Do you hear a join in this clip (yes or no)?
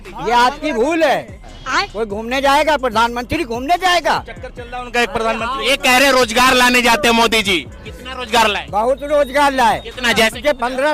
yes